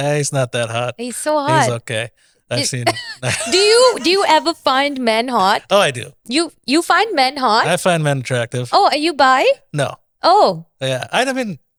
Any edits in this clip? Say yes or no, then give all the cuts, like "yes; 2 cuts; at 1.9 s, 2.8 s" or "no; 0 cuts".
no; 0 cuts